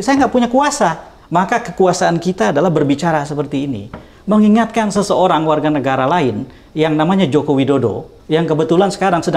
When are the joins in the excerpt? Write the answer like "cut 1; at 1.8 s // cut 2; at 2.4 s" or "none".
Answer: cut 1; at 1.1 s // cut 2; at 8.1 s